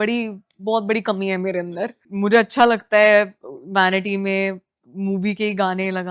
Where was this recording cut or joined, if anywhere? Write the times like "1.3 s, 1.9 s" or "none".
none